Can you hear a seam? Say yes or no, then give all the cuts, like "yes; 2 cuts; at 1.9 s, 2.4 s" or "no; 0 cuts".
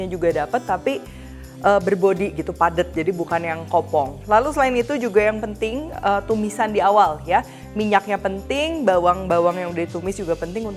no; 0 cuts